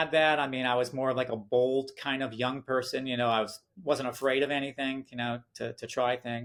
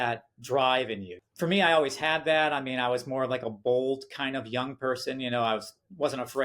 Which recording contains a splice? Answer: second; 1 cut; at 1.2 s

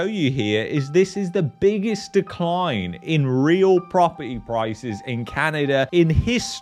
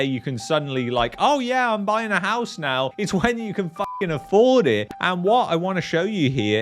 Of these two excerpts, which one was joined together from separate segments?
second; 1 cut; at 4.9 s

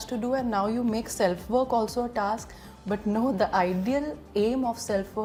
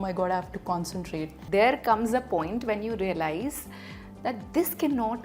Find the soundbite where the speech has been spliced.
second; 1 cut; at 1.4 s

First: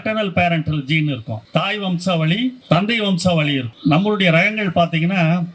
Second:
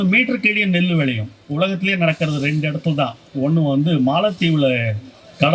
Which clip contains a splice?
first; 3 cuts; at 1.3 s, 2.6 s, 3.7 s

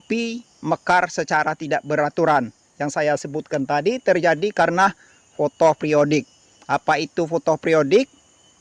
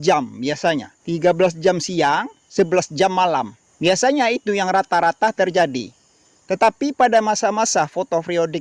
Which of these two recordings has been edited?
second; 3 cuts; at 0.9 s, 2.4 s, 3.6 s

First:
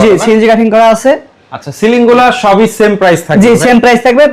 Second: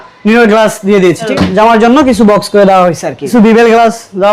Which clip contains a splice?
second; 2 cuts; at 1.3 s, 3.3 s

